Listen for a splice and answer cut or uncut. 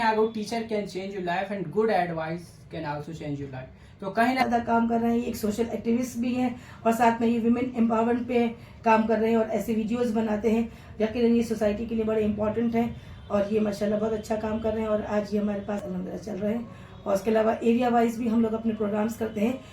cut